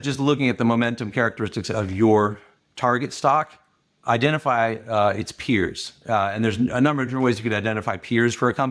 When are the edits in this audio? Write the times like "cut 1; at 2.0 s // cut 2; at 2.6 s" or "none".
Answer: none